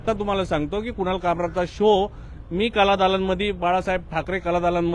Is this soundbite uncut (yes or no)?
yes